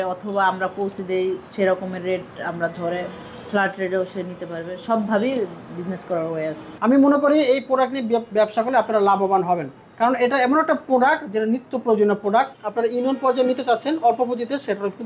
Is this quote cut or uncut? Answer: cut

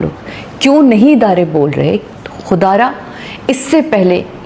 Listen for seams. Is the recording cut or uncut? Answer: cut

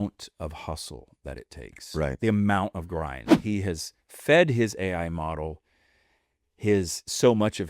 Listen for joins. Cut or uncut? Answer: cut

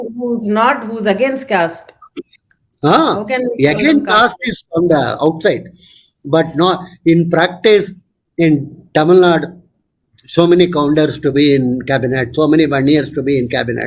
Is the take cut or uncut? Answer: uncut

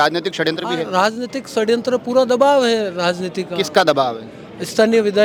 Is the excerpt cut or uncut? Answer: uncut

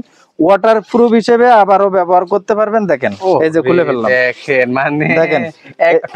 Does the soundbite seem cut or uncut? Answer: uncut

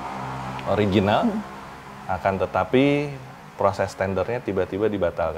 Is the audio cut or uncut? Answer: uncut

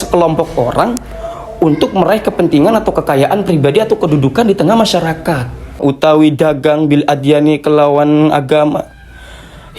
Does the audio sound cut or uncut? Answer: cut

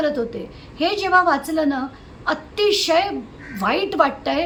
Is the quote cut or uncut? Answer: uncut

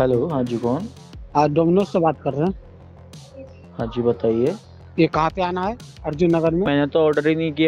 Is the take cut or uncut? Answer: cut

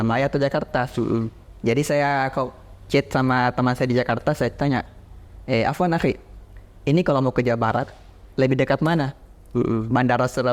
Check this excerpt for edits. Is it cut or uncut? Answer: uncut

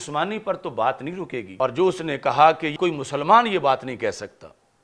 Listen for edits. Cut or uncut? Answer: cut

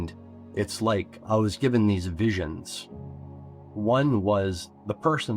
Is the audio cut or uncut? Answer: cut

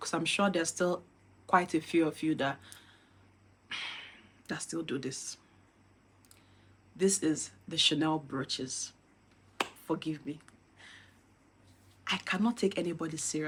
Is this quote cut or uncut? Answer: uncut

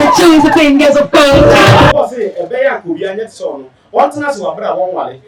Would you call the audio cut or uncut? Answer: cut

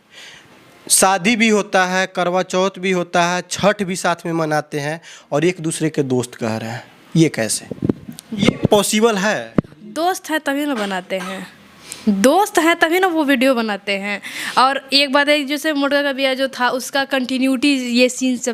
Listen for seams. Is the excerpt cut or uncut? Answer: uncut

